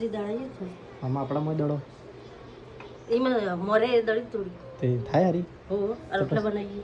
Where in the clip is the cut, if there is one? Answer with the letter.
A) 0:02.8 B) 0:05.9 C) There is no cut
C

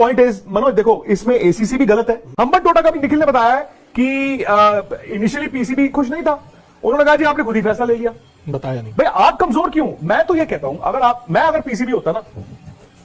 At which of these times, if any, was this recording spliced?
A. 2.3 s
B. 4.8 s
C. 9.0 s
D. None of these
A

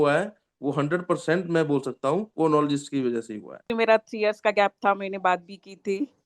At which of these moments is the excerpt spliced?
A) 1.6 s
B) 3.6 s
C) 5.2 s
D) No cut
B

